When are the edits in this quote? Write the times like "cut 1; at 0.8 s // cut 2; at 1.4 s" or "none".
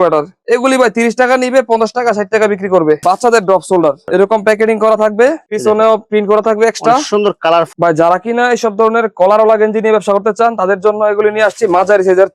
cut 1; at 3.0 s // cut 2; at 7.7 s